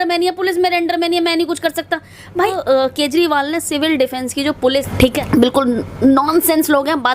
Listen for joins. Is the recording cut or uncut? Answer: cut